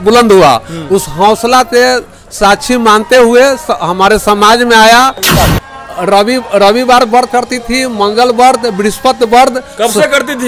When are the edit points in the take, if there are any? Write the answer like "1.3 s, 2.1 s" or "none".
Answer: 5.4 s